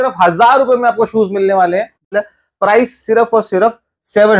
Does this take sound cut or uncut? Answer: cut